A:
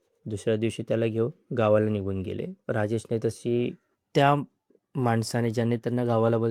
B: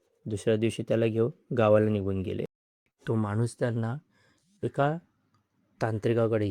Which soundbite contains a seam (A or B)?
B